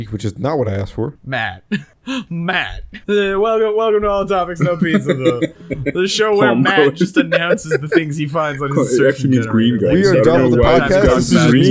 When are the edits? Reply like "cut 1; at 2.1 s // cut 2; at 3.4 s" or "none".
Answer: none